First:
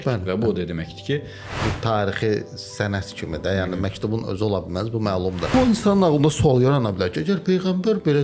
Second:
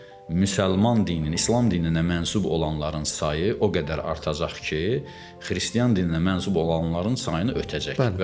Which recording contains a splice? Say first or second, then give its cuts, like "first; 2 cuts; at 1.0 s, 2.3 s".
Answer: first; 2 cuts; at 1.4 s, 5.5 s